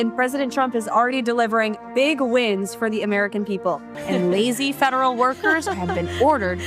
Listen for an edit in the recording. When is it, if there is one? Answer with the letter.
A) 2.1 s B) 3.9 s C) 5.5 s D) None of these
B